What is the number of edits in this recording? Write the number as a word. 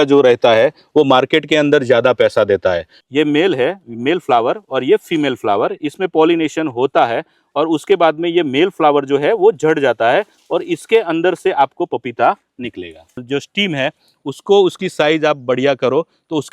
two